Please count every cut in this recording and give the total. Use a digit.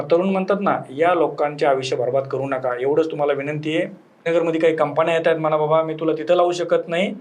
1